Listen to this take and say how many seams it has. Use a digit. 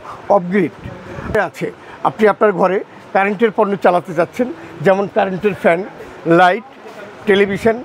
1